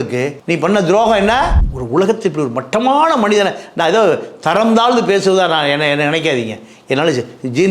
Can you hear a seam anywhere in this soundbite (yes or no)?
yes